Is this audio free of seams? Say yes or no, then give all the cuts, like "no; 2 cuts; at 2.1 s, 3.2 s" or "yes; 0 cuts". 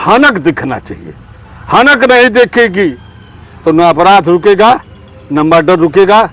yes; 0 cuts